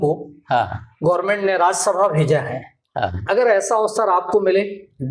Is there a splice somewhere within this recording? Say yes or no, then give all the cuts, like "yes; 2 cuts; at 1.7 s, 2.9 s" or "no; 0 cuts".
no; 0 cuts